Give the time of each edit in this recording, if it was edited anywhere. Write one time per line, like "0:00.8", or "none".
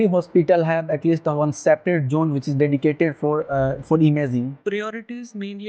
0:04.6

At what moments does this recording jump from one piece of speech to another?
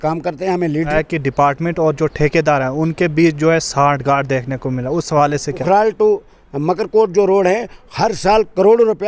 0:00.9
0:05.6

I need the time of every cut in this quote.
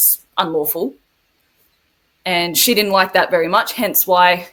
none

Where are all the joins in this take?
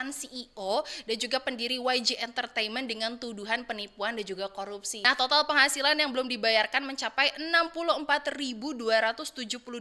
0:04.9

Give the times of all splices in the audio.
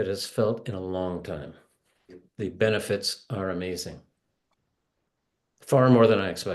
0:02.2

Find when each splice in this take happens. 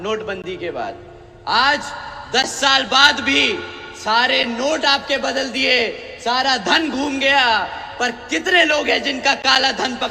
none

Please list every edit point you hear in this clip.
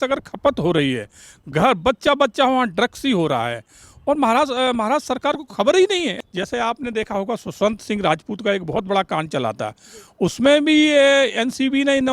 0:06.2

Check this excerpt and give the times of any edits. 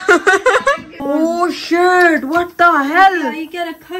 0:00.9

